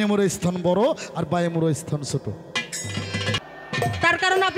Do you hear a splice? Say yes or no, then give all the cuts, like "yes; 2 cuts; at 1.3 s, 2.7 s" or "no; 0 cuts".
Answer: yes; 1 cut; at 3.4 s